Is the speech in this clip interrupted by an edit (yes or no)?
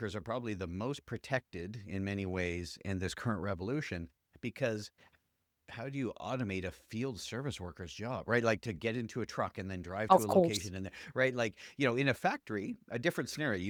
no